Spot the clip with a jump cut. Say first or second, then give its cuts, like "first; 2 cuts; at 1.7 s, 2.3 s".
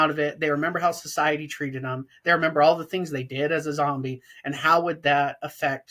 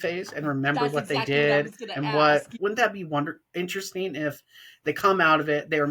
second; 1 cut; at 2.5 s